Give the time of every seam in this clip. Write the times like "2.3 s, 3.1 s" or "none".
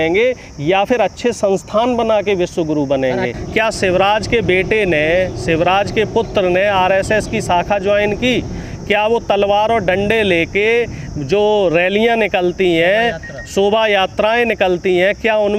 3.3 s